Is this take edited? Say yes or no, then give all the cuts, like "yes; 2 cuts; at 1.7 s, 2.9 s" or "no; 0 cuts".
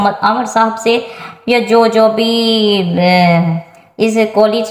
no; 0 cuts